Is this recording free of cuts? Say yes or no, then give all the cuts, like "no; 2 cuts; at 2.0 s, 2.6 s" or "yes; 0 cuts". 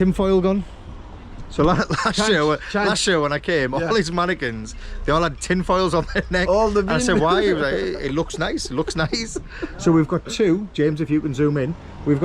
yes; 0 cuts